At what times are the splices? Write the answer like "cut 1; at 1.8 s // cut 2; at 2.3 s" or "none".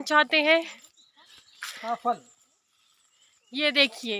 none